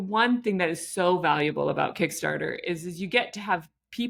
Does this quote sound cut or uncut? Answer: uncut